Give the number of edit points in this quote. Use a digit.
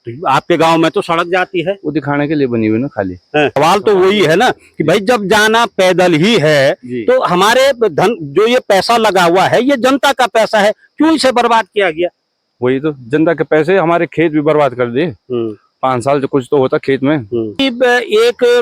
2